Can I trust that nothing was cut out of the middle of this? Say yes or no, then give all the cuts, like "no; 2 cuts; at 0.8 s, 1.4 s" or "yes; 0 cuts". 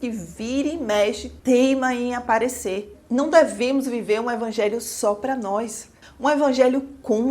no; 1 cut; at 2.9 s